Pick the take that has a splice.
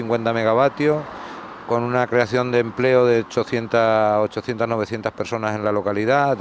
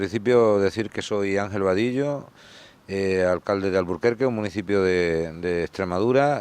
second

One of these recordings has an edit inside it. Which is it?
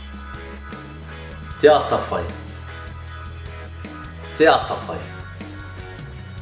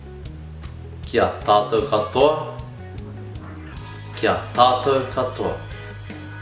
second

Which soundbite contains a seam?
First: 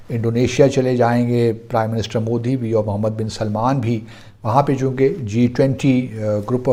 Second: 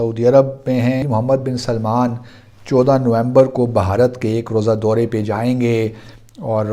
second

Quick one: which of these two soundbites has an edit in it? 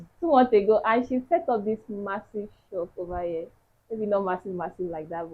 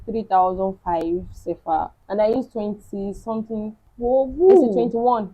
second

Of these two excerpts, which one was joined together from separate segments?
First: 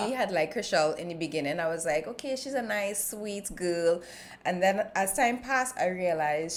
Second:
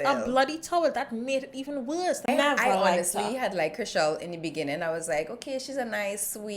second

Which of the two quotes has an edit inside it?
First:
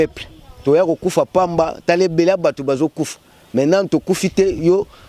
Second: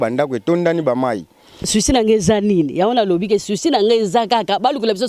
second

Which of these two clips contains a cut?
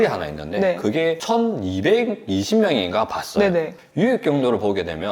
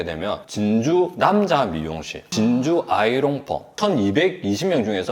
second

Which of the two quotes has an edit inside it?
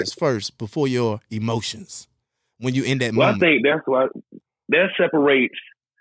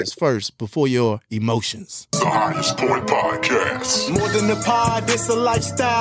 second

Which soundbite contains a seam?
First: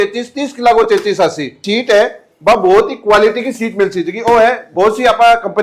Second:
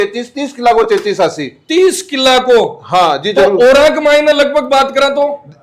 first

